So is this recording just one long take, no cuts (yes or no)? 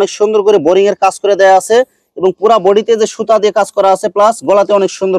yes